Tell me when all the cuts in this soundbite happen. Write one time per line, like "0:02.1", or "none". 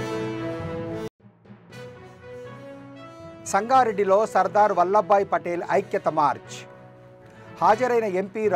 0:00.9